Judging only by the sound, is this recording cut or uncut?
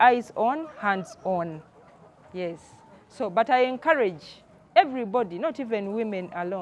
uncut